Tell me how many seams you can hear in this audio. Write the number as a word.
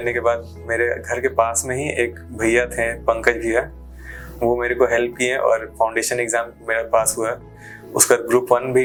zero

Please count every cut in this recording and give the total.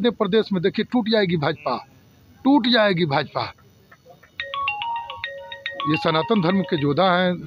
zero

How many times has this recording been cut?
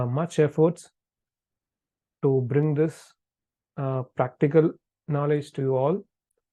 zero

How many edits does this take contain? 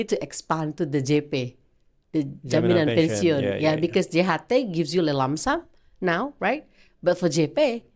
zero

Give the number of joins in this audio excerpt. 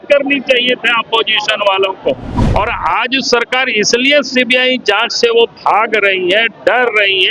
one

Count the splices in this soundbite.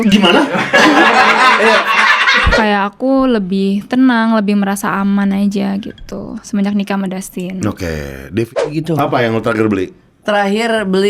two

